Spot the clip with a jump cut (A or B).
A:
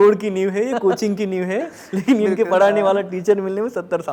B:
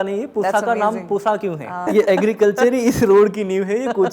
B